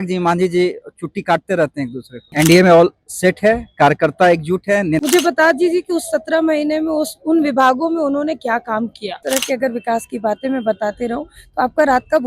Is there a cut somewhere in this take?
yes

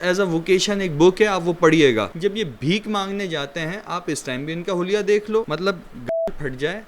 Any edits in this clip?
yes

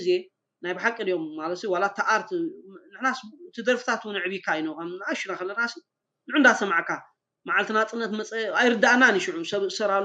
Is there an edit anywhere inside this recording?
no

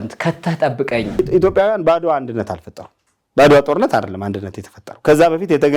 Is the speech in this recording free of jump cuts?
no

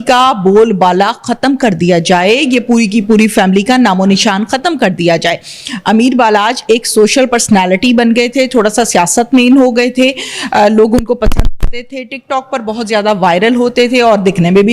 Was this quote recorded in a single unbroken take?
yes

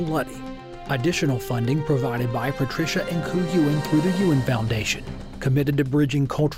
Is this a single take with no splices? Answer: yes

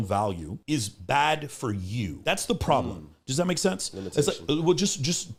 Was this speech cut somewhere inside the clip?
no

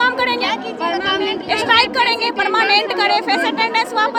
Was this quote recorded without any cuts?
yes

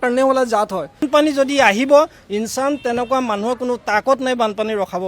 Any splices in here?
yes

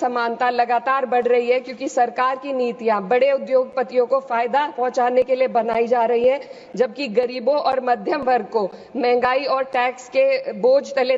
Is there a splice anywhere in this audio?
no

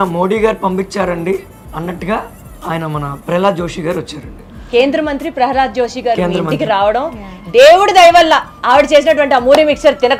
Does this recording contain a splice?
no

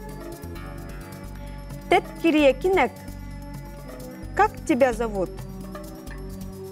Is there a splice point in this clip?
no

